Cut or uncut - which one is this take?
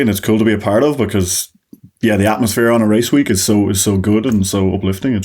uncut